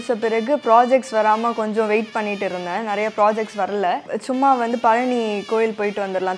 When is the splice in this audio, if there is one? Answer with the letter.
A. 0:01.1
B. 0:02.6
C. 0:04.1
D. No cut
C